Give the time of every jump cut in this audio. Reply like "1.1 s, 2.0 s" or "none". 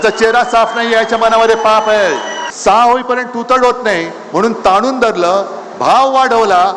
2.4 s